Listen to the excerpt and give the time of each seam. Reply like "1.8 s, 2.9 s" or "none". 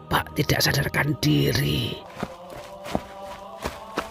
2.0 s